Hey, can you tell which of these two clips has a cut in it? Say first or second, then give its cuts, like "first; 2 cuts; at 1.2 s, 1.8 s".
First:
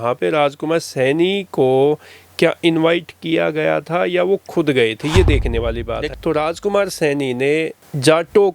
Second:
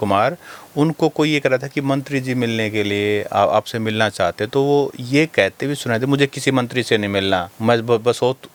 first; 1 cut; at 6.0 s